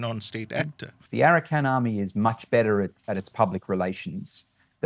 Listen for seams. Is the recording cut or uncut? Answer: cut